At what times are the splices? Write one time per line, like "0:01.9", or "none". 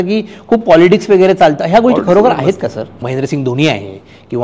0:02.9